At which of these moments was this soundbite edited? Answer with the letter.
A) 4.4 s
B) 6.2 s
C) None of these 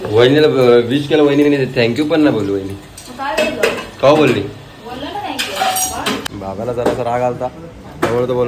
B